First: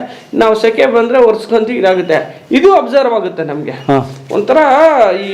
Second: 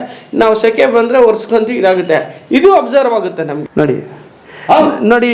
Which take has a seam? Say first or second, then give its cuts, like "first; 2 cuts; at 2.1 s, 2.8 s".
second; 1 cut; at 3.6 s